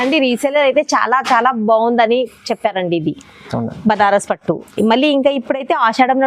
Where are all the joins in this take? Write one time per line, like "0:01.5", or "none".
none